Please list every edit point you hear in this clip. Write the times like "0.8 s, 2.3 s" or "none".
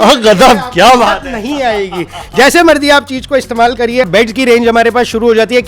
4.1 s